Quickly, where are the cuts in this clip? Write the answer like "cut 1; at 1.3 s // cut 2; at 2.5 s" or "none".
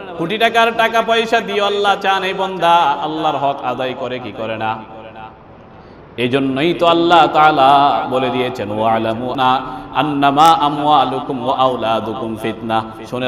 cut 1; at 9.3 s